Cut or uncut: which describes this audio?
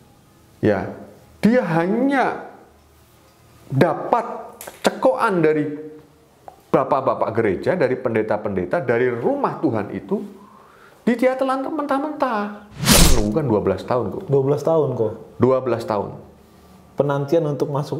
cut